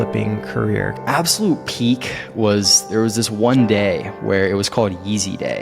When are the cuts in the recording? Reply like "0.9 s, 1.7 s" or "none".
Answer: 1.0 s